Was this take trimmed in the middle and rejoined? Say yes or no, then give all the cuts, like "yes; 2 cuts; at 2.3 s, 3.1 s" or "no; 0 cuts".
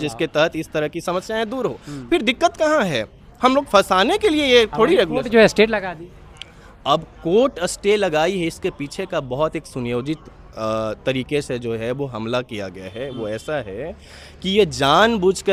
no; 0 cuts